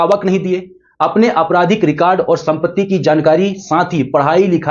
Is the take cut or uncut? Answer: uncut